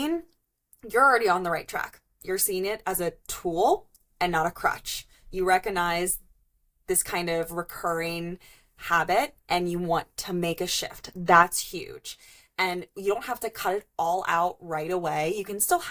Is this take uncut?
yes; 0 cuts

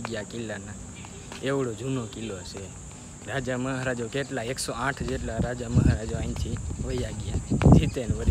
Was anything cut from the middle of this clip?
no; 0 cuts

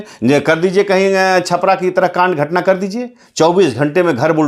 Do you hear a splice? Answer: no; 0 cuts

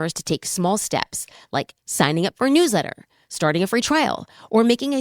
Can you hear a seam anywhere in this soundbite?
no; 0 cuts

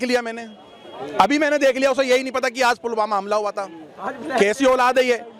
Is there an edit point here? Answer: no; 0 cuts

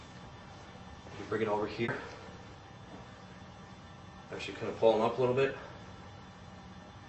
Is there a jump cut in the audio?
yes; 1 cut; at 1.9 s

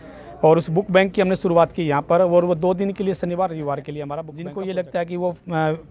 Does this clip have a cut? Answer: yes; 1 cut; at 4.3 s

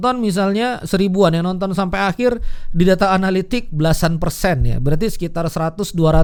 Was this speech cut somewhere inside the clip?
no; 0 cuts

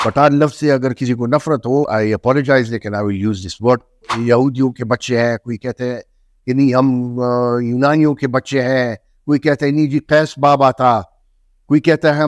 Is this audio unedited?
no; 2 cuts; at 1.9 s, 4.1 s

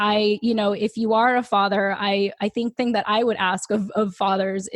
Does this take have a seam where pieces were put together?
yes; 1 cut; at 2.8 s

